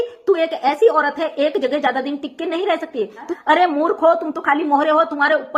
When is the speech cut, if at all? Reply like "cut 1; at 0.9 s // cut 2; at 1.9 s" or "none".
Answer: cut 1; at 3.3 s